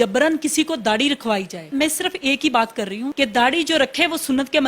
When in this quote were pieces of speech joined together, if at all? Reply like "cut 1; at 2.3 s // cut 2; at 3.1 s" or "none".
cut 1; at 1.7 s // cut 2; at 3.1 s